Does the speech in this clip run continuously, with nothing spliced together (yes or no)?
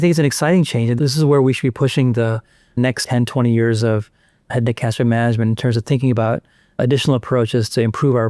no